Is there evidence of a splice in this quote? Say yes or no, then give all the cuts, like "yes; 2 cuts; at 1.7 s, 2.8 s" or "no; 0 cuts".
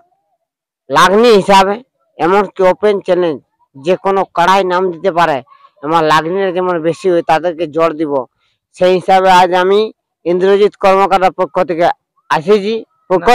no; 0 cuts